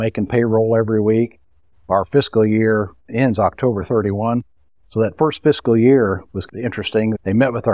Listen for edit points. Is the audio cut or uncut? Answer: uncut